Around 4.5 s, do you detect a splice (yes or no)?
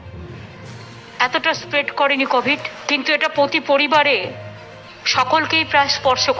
no